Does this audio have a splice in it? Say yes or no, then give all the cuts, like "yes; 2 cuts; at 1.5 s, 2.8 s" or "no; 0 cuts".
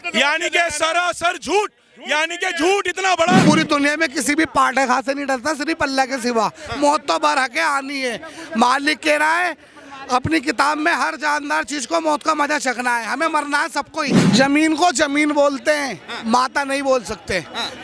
yes; 2 cuts; at 3.4 s, 14.2 s